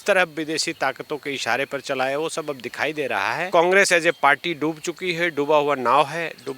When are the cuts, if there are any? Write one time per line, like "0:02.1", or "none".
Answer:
0:03.4